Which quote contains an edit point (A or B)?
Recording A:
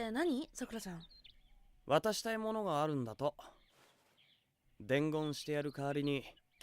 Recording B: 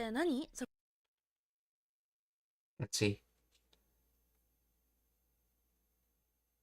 A